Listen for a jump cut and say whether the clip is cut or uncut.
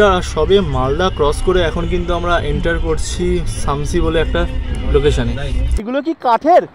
cut